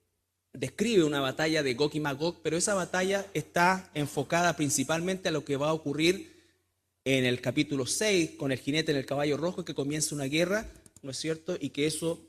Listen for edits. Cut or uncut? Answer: cut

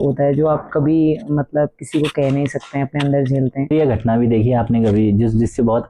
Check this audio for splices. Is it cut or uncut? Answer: cut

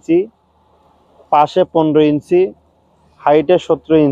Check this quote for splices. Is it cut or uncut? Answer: uncut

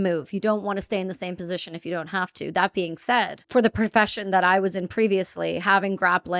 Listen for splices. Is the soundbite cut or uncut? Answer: cut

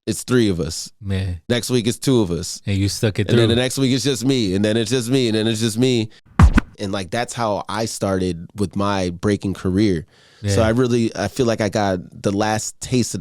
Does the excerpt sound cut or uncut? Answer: cut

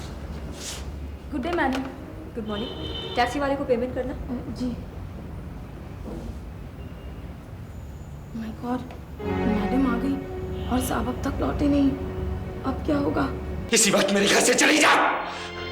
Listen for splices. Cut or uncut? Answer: cut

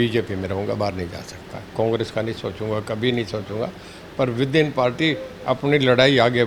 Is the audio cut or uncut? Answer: uncut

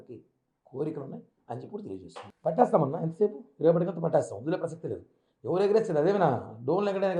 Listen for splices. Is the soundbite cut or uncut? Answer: cut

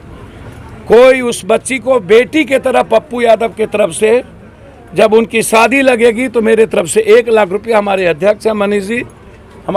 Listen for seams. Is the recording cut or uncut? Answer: uncut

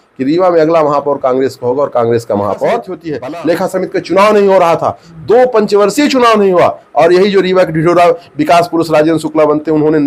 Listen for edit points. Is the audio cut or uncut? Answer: cut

